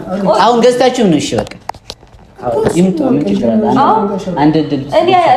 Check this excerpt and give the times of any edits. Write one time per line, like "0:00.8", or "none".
none